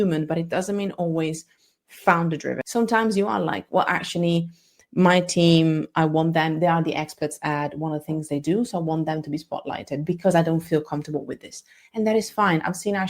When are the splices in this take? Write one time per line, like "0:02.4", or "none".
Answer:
0:02.6